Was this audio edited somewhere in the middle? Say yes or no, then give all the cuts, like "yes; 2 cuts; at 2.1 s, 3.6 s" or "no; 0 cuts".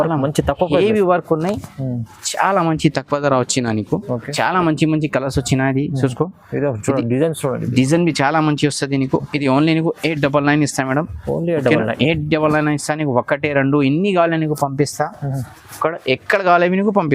yes; 1 cut; at 4.3 s